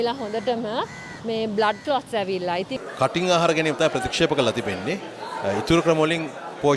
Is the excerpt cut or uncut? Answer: cut